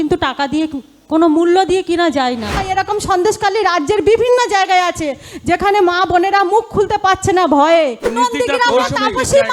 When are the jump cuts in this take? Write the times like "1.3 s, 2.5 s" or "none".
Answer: 2.6 s, 8.1 s